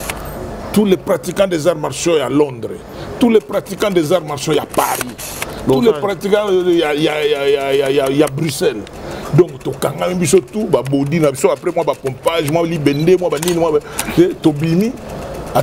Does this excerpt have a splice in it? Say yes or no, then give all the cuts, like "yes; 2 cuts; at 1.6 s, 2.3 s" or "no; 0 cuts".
no; 0 cuts